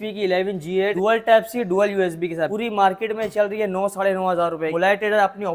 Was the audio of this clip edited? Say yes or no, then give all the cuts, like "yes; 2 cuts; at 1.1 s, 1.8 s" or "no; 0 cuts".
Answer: yes; 3 cuts; at 0.9 s, 2.5 s, 4.7 s